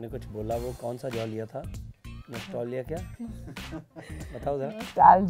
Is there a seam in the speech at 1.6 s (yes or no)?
no